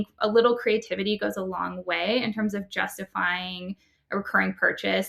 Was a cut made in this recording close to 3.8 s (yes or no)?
no